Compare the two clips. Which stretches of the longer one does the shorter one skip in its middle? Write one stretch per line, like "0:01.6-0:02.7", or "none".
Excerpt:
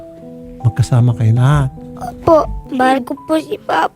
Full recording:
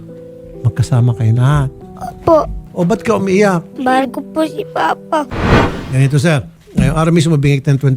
0:02.6-0:03.7